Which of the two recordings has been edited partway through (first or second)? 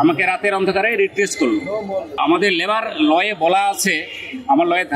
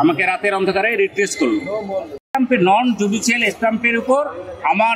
second